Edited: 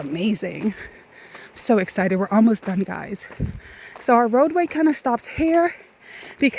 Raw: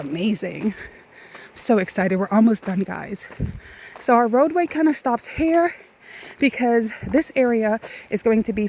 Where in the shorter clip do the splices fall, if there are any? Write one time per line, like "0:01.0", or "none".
none

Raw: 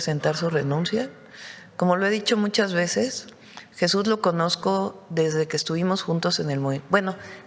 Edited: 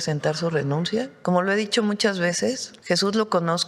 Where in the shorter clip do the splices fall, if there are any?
0:01.1
0:02.7

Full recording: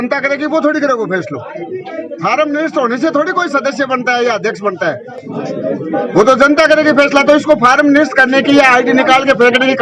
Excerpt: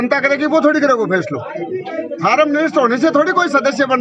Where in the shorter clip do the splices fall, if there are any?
none

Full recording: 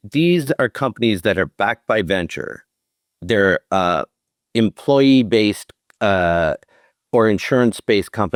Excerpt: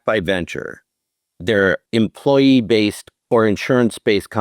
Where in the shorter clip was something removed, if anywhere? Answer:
0:01.8
0:03.1

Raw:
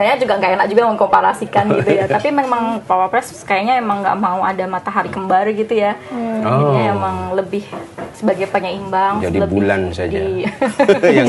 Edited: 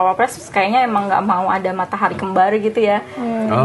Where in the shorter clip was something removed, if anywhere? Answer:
none

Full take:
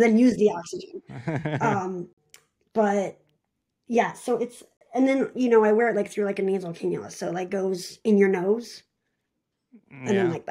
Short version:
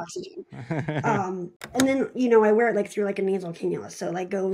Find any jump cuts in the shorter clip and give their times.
0:01.5

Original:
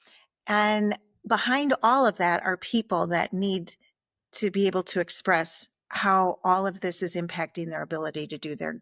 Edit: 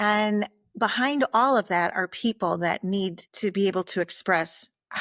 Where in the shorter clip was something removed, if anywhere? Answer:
0:03.2

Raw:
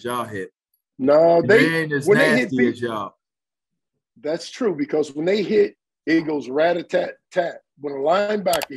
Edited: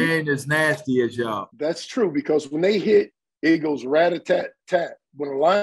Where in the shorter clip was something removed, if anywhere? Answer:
none

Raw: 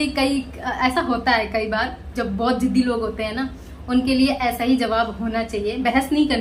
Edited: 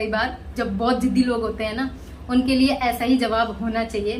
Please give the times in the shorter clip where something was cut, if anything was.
none

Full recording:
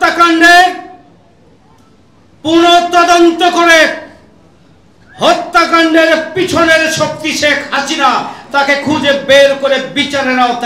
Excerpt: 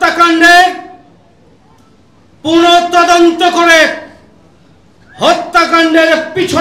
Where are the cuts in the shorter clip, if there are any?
none

